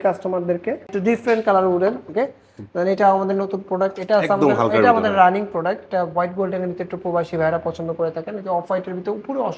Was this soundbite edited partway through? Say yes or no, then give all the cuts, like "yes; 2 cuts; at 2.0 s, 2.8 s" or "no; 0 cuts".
yes; 1 cut; at 0.9 s